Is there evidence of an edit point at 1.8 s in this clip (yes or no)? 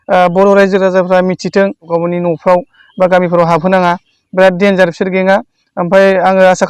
yes